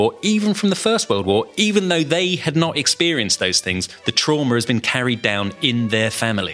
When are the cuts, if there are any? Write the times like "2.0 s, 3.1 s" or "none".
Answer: none